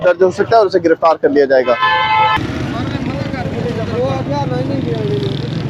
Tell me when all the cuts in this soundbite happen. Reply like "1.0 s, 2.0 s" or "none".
none